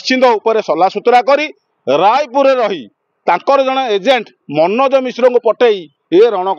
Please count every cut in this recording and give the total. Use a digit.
0